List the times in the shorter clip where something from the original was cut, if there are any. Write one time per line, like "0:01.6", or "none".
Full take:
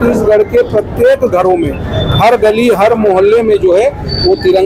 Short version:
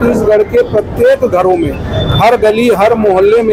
none